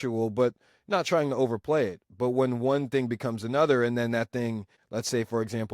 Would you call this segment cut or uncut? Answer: cut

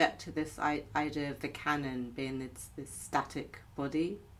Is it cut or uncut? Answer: uncut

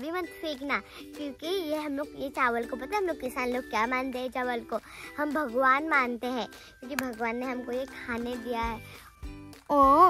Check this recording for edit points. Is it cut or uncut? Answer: cut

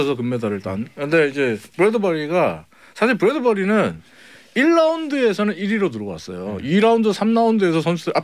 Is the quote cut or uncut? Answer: uncut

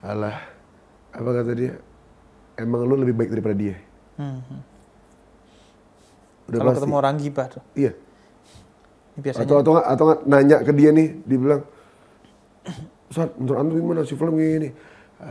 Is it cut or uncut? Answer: uncut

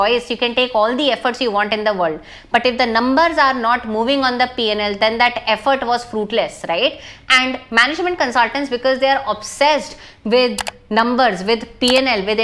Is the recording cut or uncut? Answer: uncut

